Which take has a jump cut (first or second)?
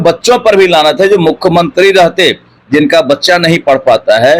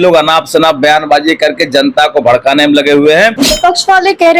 second